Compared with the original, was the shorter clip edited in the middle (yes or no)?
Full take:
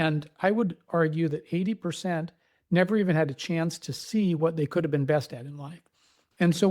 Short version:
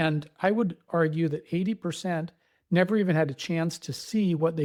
no